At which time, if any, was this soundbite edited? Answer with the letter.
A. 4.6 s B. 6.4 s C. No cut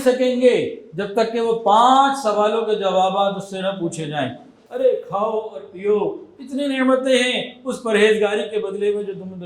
A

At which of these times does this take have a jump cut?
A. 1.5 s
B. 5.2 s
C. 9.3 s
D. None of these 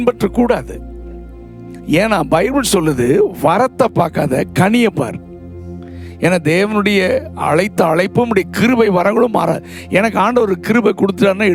D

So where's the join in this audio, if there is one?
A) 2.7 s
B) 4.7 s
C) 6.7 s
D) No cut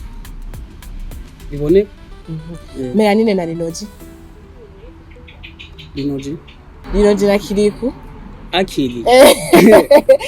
C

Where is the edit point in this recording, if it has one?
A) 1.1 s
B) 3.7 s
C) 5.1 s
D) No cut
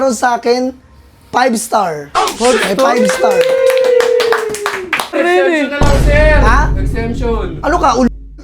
C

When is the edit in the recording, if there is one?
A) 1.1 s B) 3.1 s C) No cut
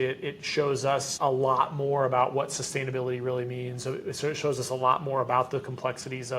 A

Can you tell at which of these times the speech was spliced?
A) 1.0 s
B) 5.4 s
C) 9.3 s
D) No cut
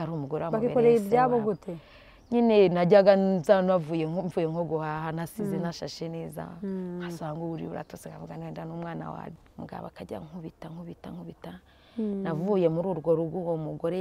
C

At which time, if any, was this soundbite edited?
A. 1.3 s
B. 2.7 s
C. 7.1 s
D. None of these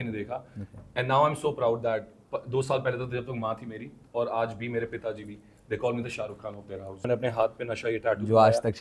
C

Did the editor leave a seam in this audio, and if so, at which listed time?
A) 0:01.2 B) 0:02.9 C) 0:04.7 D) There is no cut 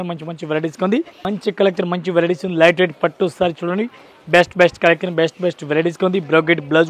A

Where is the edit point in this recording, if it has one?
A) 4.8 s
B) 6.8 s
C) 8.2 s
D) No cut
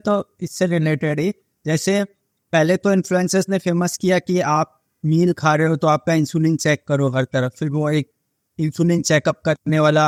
D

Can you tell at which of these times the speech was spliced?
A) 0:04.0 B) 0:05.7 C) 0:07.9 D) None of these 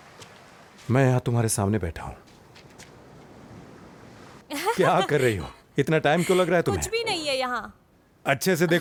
D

